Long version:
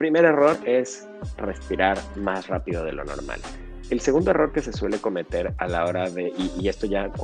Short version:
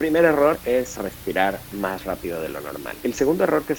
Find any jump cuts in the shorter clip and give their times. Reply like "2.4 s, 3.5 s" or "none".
0.9 s, 2.9 s